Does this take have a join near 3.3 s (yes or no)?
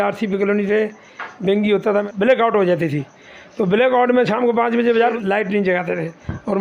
no